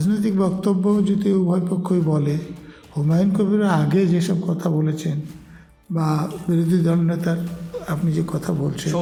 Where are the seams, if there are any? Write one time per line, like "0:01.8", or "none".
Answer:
none